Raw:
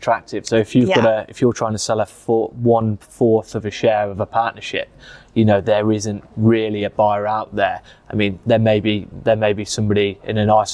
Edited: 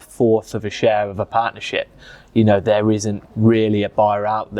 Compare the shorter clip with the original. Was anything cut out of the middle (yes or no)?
no